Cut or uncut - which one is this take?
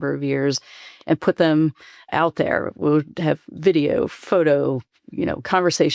cut